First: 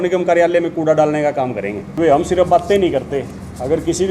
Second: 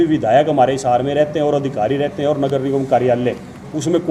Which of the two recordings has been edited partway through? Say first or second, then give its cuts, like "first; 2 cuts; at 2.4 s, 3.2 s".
first; 1 cut; at 1.9 s